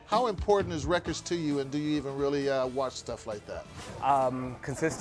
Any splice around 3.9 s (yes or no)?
yes